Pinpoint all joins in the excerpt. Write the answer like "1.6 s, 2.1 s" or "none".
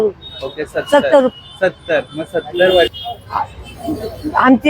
2.9 s